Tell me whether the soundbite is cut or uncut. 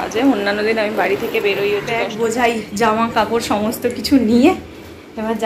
cut